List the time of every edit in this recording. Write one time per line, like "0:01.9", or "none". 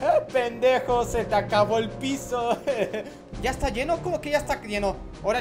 0:03.2

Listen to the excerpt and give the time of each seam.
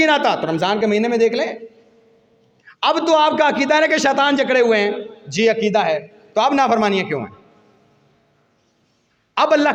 none

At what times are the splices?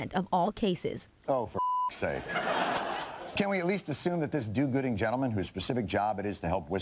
0:02.8

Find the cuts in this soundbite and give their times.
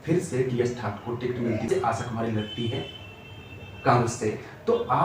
0:01.7

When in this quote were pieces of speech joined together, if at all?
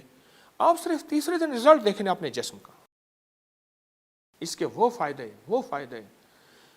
none

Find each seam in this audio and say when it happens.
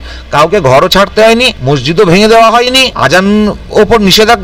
0:01.6
0:02.9

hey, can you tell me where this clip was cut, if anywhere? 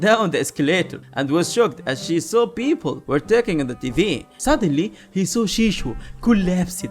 0:04.3

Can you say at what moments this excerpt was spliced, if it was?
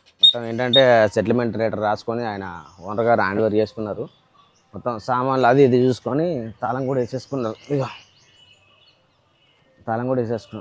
none

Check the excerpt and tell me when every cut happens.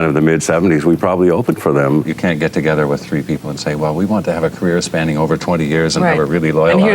0:02.1

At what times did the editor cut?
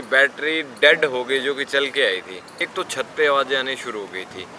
0:02.6

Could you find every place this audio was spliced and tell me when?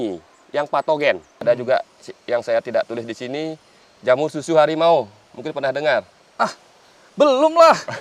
0:01.3

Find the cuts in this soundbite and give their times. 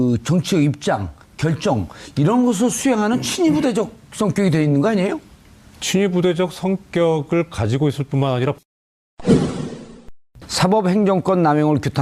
0:08.6

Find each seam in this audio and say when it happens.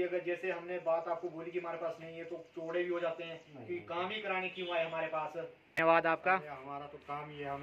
0:05.7

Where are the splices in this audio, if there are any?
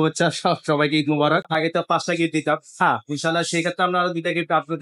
0:01.5

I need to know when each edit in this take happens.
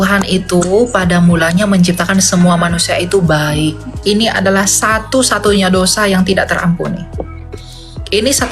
0:04.0

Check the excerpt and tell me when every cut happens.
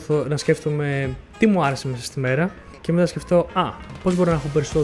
0:01.2

